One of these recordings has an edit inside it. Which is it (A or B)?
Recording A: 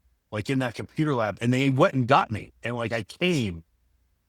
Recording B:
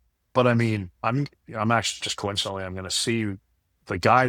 B